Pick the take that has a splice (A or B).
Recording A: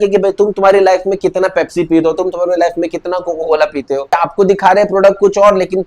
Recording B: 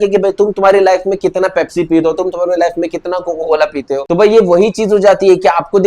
A